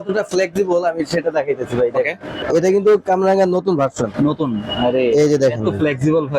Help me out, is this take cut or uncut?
cut